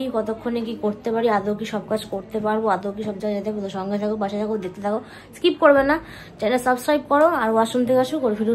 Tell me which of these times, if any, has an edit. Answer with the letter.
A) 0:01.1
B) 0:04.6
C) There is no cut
C